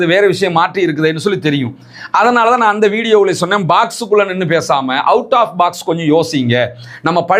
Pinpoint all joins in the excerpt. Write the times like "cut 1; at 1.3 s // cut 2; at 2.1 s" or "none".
none